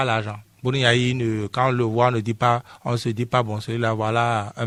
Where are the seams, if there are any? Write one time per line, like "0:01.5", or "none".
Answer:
none